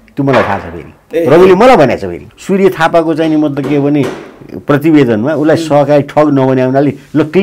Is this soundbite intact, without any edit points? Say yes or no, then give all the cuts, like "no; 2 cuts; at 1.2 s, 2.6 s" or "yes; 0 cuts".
no; 1 cut; at 2.2 s